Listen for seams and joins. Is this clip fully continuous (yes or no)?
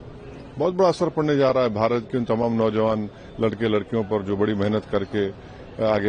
yes